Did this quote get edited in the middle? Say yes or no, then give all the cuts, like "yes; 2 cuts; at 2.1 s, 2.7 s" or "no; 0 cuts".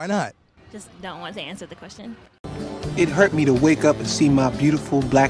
yes; 1 cut; at 2.3 s